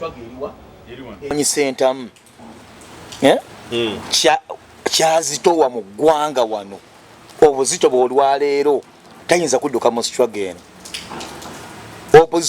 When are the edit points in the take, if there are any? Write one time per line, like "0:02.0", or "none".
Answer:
0:01.3

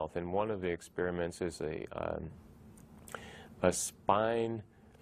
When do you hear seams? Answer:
none

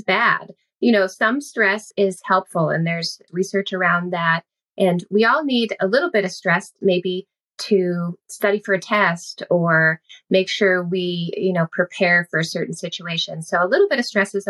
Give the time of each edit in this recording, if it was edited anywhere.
0:01.9
0:03.2

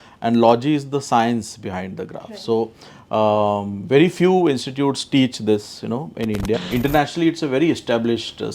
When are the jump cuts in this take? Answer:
0:06.6

